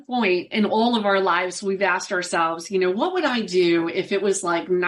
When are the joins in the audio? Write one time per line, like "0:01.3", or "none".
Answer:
none